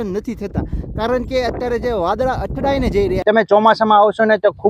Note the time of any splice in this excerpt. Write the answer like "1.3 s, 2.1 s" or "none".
3.2 s